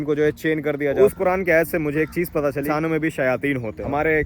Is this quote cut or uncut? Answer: cut